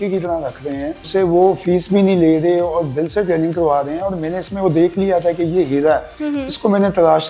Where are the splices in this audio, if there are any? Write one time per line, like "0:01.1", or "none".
0:01.1
0:06.2